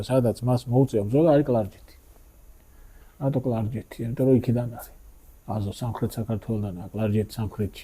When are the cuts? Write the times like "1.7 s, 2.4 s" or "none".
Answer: none